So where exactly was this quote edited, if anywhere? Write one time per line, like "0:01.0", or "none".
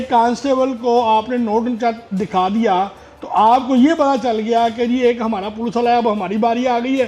none